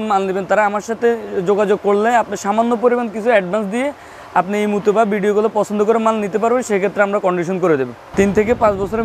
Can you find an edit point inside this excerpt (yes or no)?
yes